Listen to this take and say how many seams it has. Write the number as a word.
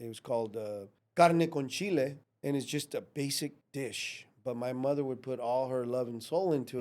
three